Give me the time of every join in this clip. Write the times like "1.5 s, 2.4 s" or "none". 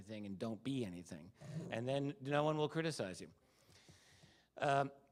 none

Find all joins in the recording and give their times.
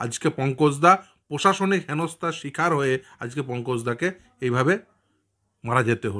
none

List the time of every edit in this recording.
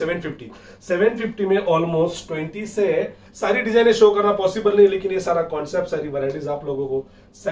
3.2 s

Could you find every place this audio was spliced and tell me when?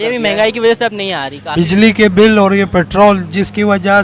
1.3 s

